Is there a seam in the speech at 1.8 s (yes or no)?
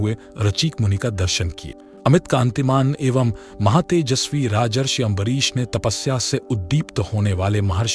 no